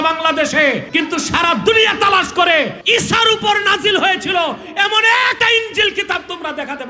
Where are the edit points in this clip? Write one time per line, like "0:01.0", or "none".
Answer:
0:00.9
0:02.8
0:05.4